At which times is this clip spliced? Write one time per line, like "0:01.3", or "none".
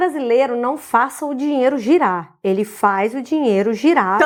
none

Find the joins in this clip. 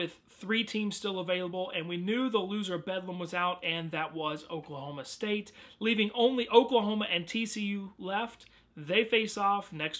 none

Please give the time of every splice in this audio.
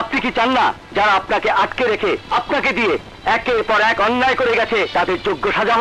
0:00.8
0:02.2
0:04.9

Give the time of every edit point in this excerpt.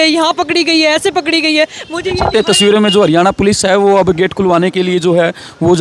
none

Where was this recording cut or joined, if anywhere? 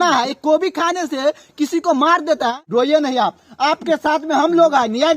0:02.7

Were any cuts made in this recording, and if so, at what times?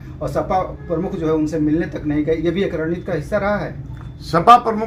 none

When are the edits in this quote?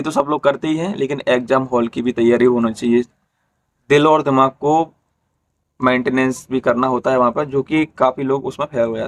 none

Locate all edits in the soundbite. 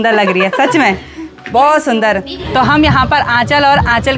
0:02.5

